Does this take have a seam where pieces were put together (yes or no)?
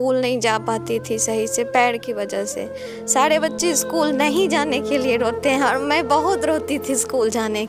no